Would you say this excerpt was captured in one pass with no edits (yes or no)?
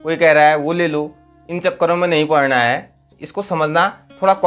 no